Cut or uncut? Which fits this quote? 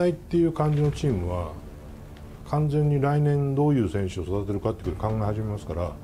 uncut